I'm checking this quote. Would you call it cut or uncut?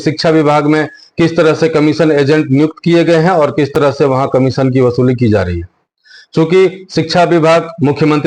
uncut